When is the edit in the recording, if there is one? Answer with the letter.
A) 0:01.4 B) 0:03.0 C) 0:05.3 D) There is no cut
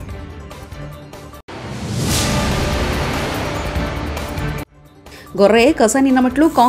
A